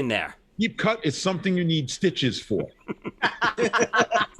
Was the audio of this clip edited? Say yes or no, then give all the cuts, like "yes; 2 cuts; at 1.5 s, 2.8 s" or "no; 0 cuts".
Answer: no; 0 cuts